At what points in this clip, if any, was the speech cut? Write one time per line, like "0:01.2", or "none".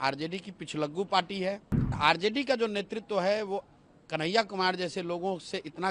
0:02.0